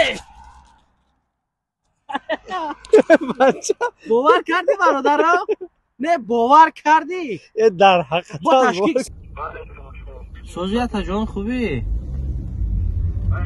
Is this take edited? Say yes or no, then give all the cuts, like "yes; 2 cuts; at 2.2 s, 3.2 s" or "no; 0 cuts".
yes; 1 cut; at 9.1 s